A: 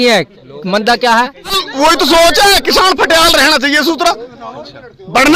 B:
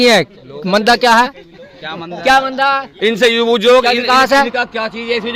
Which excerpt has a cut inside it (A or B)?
A